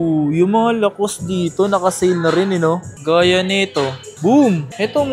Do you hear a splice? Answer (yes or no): yes